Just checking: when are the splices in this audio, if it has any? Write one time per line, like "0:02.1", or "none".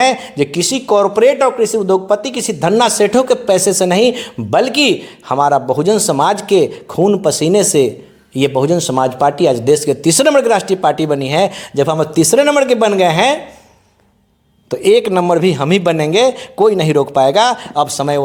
none